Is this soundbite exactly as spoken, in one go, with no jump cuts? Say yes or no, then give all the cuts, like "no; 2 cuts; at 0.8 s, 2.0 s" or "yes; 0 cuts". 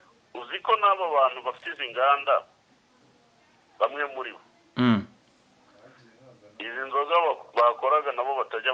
yes; 0 cuts